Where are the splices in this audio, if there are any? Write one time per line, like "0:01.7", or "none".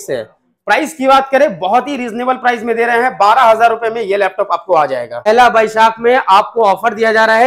0:05.3